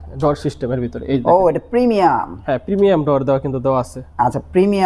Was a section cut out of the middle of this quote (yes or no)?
no